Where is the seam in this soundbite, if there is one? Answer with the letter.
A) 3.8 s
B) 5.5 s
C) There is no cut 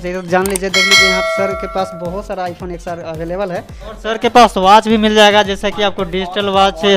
A